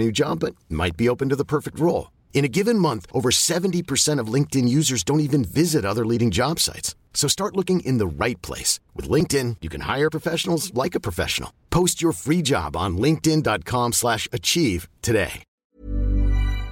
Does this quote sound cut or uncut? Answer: cut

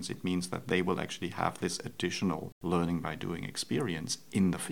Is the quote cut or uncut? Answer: uncut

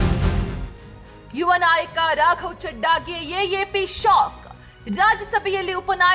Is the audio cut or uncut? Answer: cut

